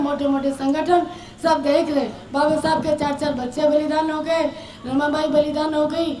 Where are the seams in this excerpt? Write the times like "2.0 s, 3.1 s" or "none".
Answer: 2.2 s